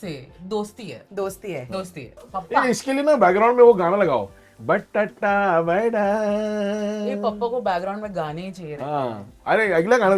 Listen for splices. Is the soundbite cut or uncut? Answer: cut